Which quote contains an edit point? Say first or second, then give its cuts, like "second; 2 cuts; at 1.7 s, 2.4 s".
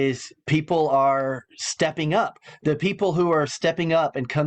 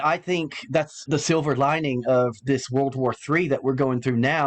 second; 1 cut; at 1.0 s